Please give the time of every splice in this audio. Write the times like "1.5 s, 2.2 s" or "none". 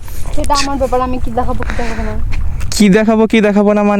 2.4 s